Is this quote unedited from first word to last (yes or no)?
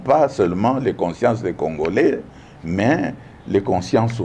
yes